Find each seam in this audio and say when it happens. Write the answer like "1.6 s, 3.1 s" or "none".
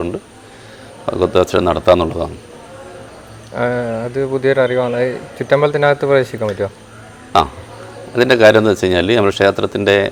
none